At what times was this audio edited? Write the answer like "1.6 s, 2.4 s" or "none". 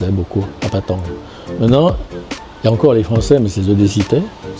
none